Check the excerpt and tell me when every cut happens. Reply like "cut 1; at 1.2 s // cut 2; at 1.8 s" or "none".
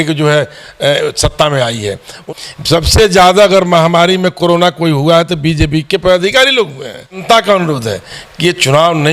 cut 1; at 2.2 s // cut 2; at 7.2 s